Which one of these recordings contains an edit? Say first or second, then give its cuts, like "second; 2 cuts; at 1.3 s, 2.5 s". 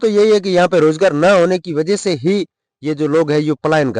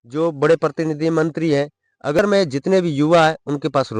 second; 1 cut; at 2.2 s